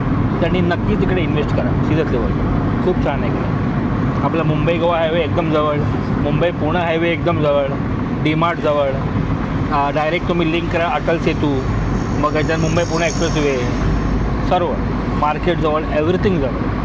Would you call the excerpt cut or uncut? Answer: uncut